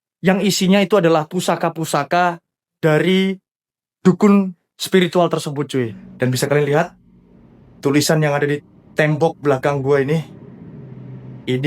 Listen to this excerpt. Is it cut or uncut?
cut